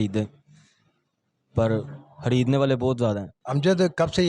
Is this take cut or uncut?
cut